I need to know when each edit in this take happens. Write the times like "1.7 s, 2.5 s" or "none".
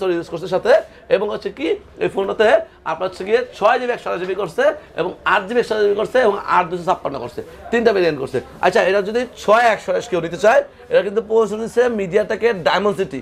none